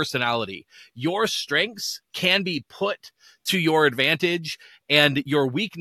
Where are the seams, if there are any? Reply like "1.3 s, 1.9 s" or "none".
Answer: none